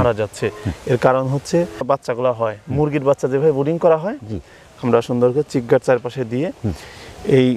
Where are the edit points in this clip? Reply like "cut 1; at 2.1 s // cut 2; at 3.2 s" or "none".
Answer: cut 1; at 1.7 s

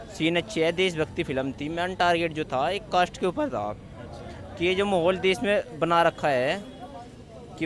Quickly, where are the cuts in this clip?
none

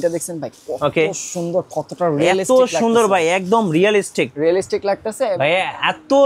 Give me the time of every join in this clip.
cut 1; at 5.3 s

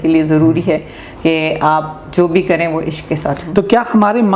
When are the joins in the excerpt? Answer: cut 1; at 3.4 s

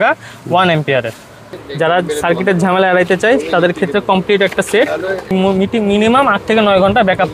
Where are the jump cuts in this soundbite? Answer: cut 1; at 1.4 s // cut 2; at 5.3 s

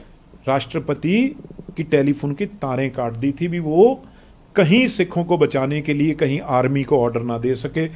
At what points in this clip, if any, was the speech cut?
none

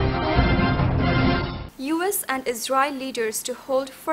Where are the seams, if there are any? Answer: cut 1; at 1.4 s

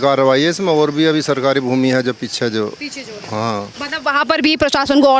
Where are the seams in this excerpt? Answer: none

